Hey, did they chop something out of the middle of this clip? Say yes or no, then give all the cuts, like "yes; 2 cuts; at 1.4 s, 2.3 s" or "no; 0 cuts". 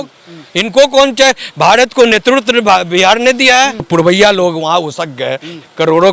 yes; 1 cut; at 3.9 s